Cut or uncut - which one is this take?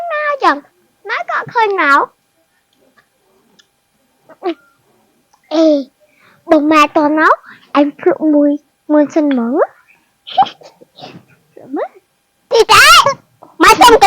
cut